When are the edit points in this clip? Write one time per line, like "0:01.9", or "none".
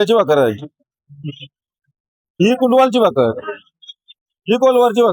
none